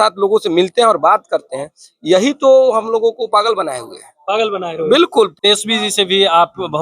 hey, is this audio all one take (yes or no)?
no